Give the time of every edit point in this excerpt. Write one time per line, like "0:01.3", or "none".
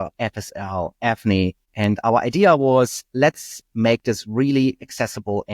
0:01.6